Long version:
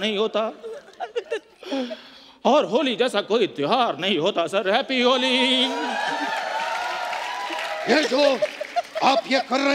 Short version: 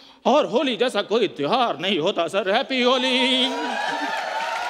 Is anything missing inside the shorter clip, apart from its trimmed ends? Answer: no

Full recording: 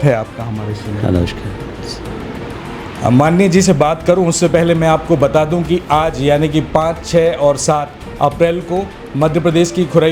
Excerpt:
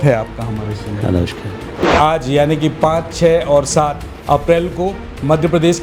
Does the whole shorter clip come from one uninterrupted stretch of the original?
no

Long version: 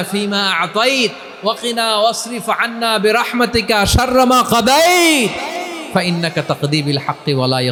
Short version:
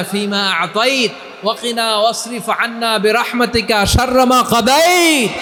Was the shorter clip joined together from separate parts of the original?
no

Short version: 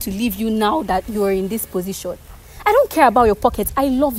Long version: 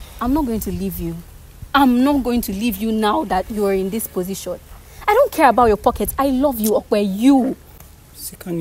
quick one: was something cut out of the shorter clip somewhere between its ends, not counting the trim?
no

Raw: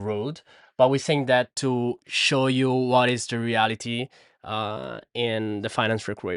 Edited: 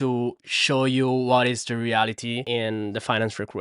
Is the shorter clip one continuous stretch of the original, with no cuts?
no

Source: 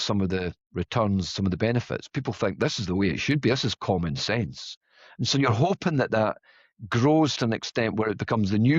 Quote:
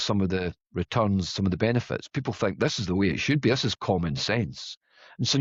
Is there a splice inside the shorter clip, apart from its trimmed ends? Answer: no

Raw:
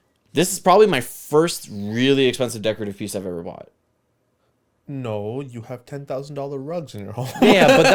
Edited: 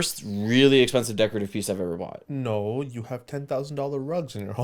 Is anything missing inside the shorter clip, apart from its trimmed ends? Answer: yes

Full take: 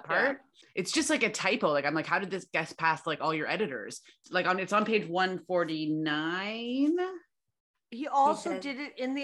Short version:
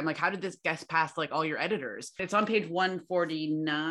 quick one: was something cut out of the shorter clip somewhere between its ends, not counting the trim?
yes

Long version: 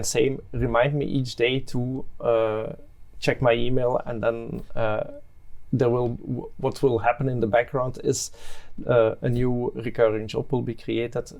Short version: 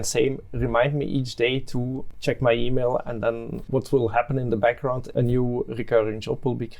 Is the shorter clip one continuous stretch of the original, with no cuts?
no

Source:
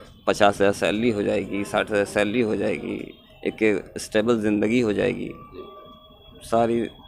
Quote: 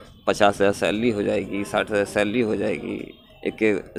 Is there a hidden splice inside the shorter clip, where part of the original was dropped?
no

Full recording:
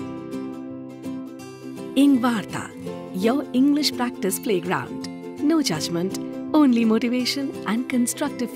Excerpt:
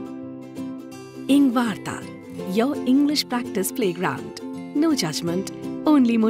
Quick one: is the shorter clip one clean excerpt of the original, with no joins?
no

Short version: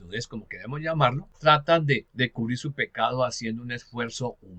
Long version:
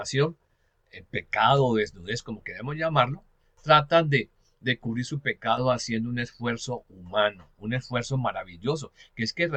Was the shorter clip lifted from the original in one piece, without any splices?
no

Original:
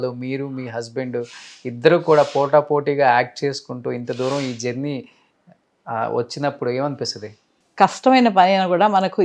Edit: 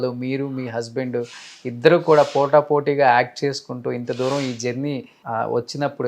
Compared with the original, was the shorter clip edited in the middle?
yes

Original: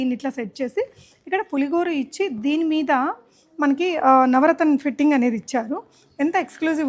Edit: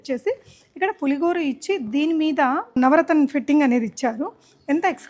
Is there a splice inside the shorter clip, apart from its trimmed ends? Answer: yes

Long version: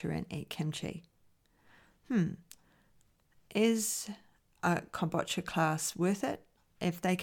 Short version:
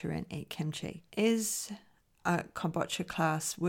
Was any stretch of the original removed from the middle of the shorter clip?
yes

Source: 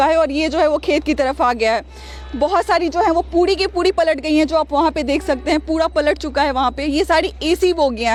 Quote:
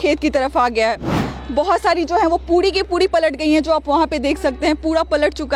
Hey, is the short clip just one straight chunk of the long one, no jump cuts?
yes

